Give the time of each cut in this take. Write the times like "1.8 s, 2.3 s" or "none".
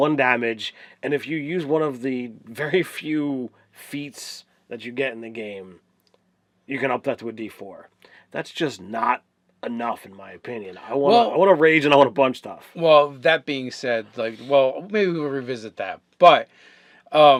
none